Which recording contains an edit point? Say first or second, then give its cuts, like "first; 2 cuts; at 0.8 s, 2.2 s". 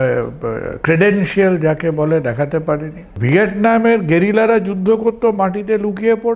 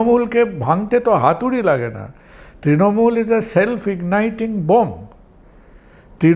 first; 1 cut; at 3.1 s